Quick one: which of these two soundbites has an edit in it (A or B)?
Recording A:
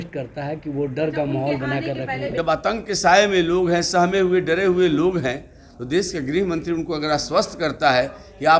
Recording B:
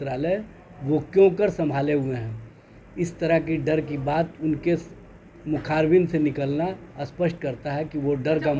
A